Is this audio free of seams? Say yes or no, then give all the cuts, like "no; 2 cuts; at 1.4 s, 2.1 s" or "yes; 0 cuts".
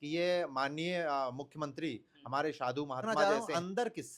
no; 1 cut; at 3.1 s